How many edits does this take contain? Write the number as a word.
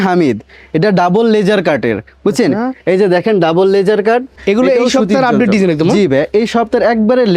one